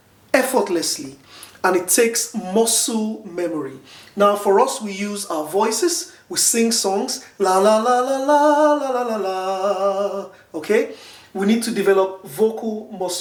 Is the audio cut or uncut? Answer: uncut